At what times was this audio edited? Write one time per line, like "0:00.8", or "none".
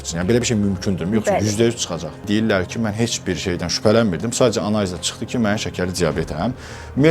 0:02.2